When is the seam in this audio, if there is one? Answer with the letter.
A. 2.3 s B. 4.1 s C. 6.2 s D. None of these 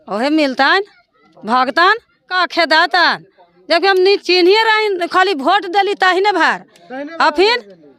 A